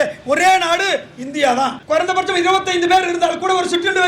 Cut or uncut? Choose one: cut